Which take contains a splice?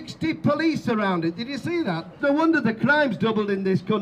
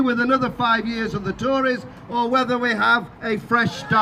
first; 1 cut; at 2.1 s

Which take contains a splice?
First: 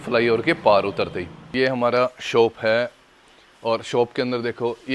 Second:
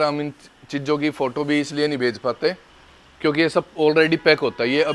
first; 1 cut; at 1.4 s

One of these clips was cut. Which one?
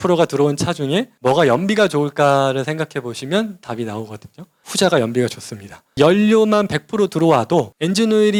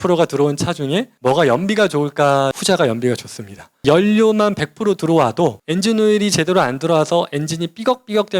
second; 1 cut; at 2.5 s

